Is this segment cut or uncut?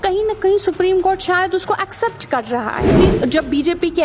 cut